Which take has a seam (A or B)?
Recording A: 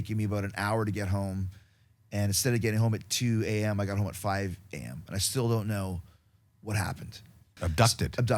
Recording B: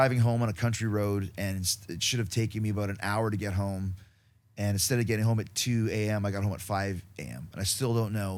A